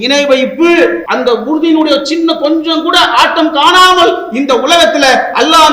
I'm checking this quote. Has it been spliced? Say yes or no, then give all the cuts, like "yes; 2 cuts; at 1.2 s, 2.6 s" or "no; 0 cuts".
yes; 1 cut; at 1.0 s